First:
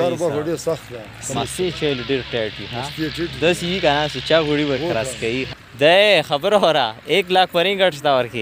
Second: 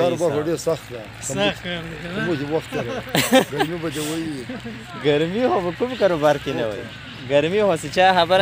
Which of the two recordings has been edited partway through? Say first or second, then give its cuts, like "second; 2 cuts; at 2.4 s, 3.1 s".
first; 2 cuts; at 1.3 s, 5.6 s